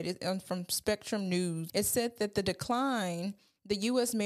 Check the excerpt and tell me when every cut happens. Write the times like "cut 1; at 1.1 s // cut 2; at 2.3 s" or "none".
cut 1; at 1.6 s